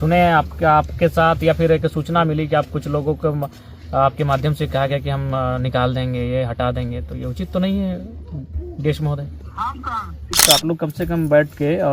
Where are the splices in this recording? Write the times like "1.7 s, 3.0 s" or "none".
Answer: 10.4 s